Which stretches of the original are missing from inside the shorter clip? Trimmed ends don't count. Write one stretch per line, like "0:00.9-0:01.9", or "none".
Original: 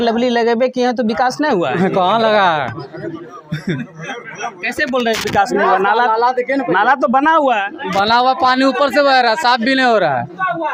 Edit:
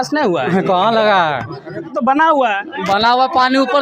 0:03.2-0:07.0

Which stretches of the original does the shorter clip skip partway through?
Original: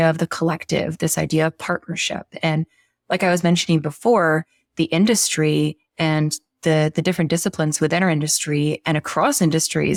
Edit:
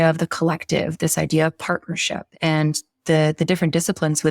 0:02.3-0:05.9

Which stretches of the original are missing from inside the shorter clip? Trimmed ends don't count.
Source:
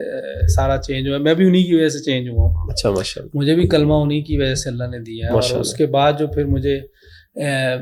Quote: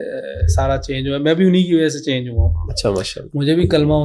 none

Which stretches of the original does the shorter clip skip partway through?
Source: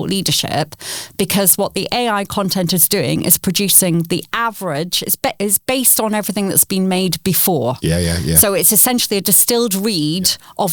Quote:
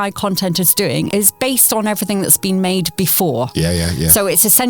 0:03.2-0:05.4

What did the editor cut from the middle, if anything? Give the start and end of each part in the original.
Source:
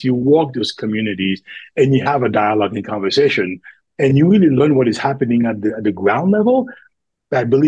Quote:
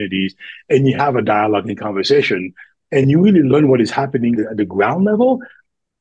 0:05.4-0:05.6

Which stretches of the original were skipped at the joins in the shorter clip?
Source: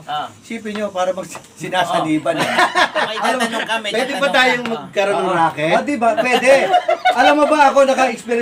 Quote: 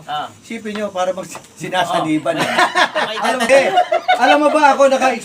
0:03.5-0:06.4

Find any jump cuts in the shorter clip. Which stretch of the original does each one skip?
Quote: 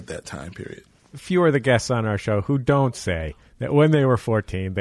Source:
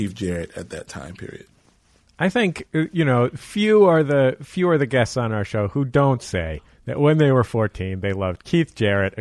0:01.8-0:04.5

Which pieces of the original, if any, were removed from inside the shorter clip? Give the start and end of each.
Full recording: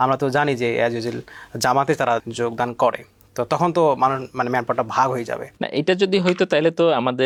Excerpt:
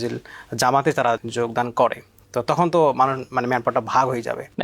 none

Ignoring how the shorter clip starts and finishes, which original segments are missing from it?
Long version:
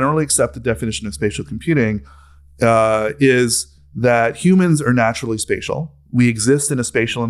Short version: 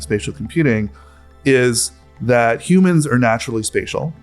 0:02.5-0:03.1

